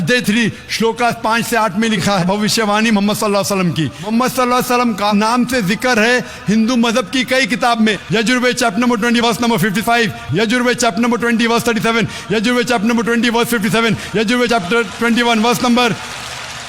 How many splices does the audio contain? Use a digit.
2